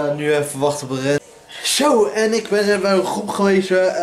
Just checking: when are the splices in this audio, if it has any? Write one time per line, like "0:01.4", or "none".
0:01.2